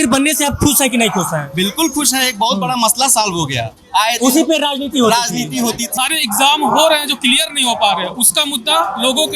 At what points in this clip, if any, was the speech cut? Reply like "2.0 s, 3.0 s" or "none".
5.9 s